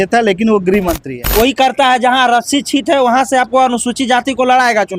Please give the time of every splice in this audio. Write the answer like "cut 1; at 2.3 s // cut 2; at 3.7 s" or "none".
cut 1; at 1.0 s